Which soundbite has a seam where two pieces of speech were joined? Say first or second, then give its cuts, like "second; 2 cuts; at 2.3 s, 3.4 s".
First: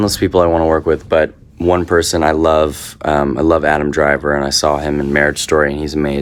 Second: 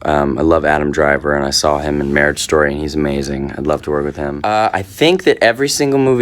second; 1 cut; at 4.3 s